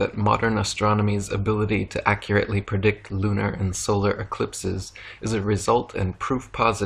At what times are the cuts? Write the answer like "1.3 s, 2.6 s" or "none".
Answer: none